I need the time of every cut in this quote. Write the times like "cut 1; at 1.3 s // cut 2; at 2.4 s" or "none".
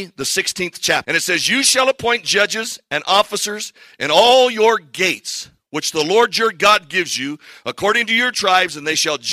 cut 1; at 1.0 s